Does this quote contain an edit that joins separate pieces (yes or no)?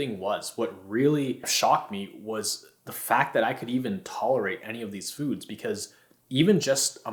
no